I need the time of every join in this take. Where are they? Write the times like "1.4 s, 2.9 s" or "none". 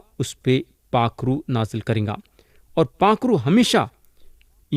none

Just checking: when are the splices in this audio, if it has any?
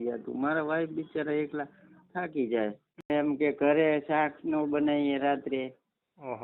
3.1 s

